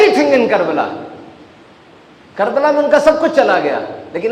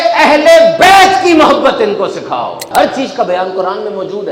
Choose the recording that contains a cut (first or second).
second